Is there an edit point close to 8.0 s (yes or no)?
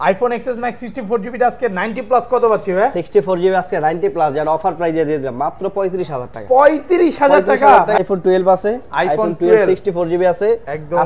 yes